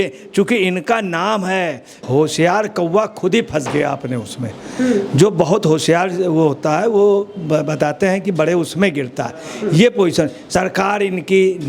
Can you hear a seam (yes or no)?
yes